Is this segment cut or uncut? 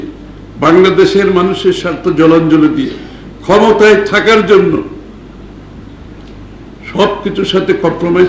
uncut